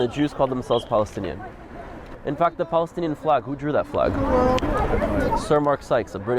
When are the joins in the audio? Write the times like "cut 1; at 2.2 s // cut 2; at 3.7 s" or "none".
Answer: none